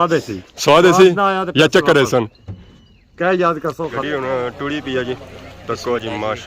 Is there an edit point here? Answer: yes; 1 cut; at 4.0 s

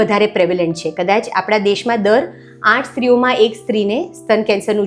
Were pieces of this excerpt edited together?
no; 0 cuts

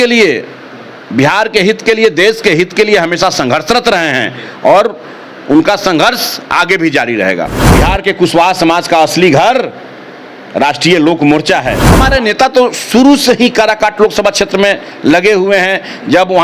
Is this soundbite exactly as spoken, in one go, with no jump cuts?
no; 2 cuts; at 7.6 s, 11.8 s

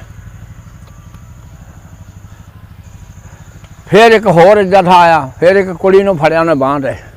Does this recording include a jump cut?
no; 0 cuts

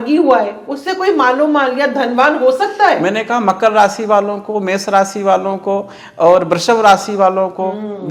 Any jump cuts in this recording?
no; 0 cuts

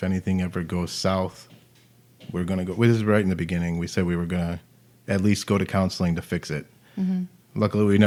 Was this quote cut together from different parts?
no; 0 cuts

